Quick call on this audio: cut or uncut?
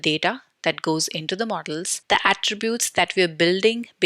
cut